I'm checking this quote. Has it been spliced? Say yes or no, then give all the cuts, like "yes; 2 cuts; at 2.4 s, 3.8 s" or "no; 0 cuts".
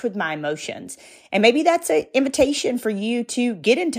no; 0 cuts